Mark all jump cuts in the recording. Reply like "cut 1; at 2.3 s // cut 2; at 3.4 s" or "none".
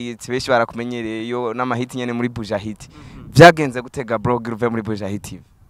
none